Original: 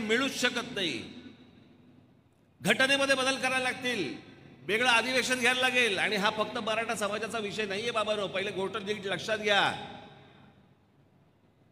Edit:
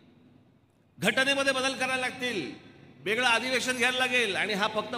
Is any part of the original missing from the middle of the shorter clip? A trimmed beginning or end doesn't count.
no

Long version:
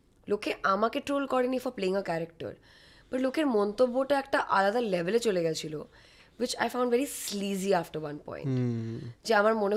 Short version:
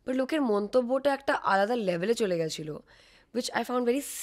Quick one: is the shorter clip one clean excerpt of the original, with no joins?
yes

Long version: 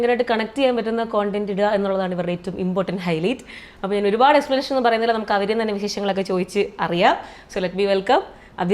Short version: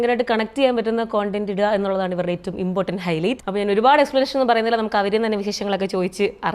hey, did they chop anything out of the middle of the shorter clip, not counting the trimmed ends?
yes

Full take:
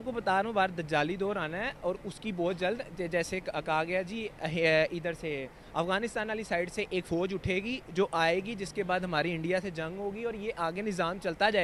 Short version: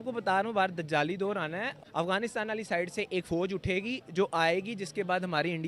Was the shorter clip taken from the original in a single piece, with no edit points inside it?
no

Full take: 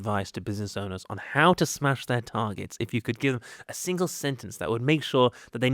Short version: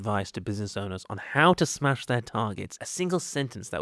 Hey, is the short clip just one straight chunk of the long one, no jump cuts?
no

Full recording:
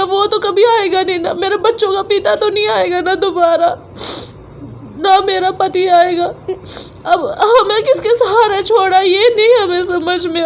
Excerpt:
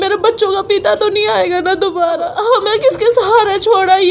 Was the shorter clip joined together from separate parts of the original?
yes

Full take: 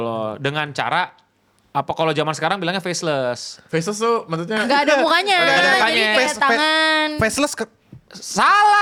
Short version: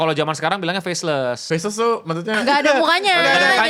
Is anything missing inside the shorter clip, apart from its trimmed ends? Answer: yes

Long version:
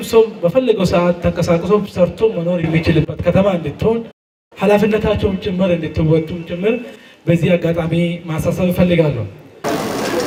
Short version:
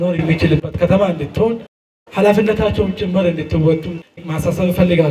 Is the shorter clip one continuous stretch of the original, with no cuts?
no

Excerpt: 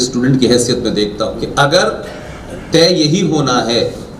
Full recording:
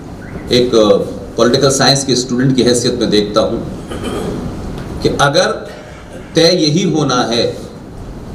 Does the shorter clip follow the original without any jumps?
no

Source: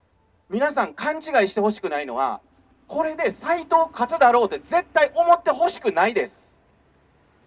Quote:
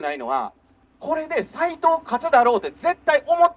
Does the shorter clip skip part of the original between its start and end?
no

